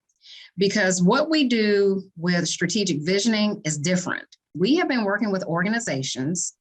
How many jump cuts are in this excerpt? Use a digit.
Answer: 1